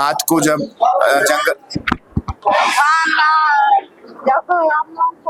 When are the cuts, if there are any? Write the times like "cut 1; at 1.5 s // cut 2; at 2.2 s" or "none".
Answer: none